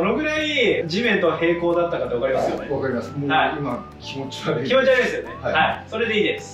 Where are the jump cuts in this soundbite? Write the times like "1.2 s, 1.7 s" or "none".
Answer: none